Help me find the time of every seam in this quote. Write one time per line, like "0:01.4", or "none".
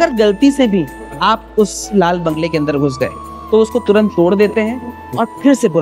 none